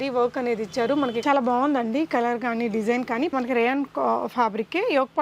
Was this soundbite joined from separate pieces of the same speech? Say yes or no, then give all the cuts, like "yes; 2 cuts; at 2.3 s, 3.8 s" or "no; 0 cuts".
yes; 2 cuts; at 1.2 s, 3.3 s